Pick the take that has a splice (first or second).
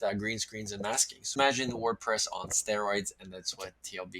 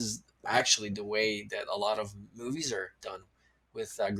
first